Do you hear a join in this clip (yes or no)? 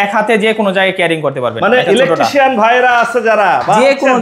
no